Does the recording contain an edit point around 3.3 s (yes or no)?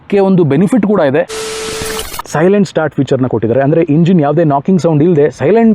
no